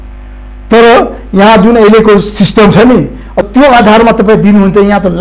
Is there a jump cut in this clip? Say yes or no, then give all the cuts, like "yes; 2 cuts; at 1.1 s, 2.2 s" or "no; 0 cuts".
yes; 1 cut; at 3.4 s